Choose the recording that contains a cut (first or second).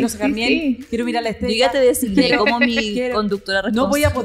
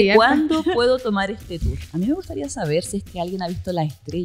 second